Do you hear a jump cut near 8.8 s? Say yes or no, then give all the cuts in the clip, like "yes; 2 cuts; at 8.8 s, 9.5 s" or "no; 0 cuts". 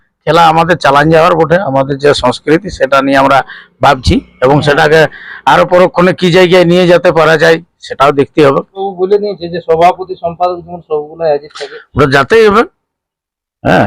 yes; 1 cut; at 8.8 s